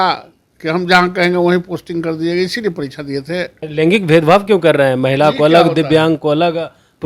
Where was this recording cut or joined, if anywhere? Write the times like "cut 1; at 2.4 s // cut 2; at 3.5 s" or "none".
cut 1; at 3.6 s